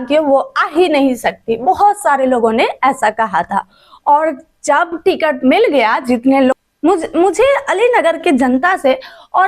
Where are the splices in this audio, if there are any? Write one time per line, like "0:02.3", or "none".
0:06.5

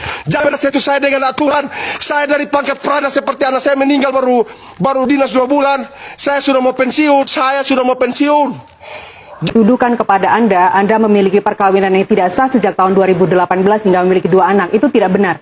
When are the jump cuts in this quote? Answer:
0:09.5

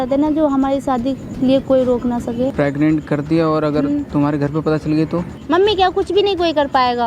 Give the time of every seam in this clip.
0:02.5
0:05.4

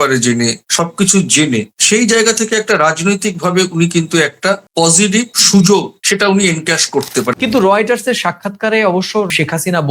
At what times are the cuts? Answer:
0:06.0
0:07.3

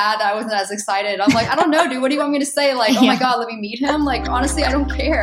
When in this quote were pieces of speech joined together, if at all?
none

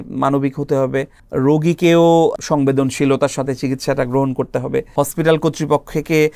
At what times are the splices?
0:01.2
0:02.3
0:04.9

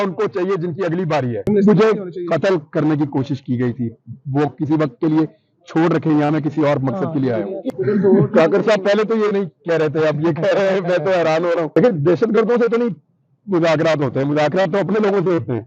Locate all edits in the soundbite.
0:01.4
0:07.6

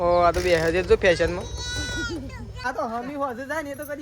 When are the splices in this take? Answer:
0:02.5

